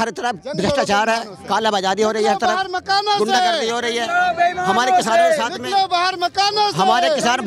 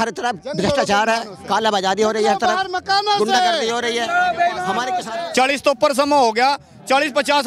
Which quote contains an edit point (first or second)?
second